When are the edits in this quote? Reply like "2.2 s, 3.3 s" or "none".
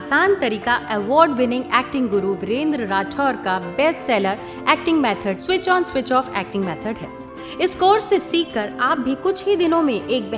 none

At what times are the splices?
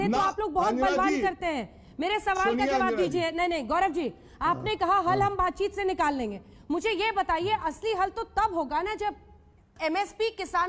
none

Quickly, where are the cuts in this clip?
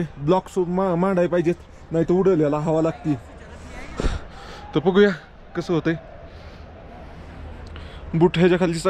none

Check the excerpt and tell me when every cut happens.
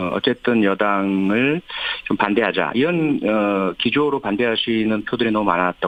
none

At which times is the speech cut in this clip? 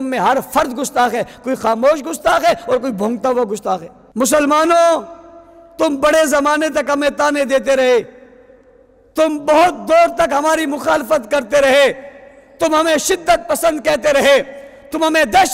4.0 s

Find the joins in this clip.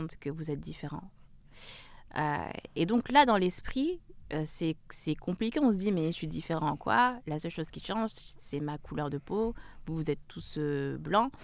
none

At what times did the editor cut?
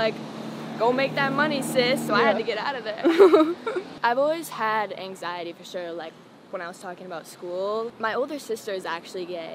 3.9 s, 7.9 s

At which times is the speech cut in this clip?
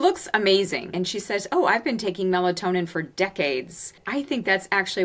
0.9 s, 4.0 s

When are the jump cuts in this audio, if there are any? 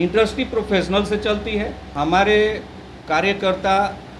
1.8 s

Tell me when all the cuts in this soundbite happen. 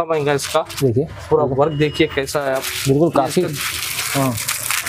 none

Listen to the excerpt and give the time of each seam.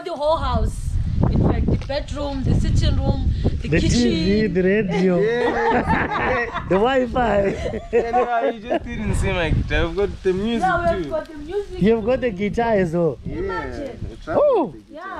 none

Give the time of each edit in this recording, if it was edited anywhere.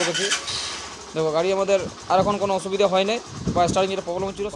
none

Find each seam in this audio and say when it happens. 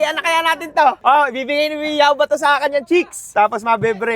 3.2 s

